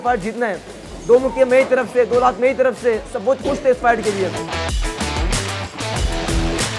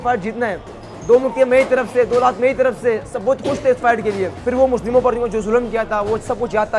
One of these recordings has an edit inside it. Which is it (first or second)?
second